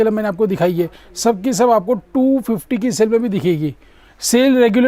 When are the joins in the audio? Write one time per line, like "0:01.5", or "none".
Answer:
none